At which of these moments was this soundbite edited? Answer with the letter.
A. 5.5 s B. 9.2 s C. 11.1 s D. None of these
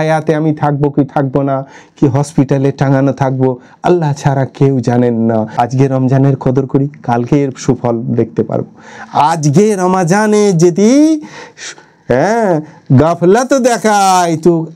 A